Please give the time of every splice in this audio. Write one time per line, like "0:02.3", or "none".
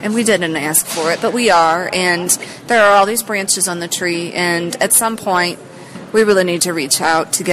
none